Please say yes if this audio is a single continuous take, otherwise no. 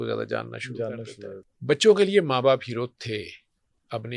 no